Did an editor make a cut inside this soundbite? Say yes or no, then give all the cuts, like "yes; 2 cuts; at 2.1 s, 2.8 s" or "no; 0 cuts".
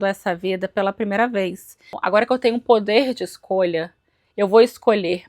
yes; 1 cut; at 2.0 s